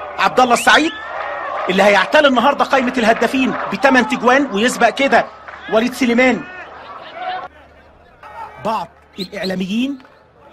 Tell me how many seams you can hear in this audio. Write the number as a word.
one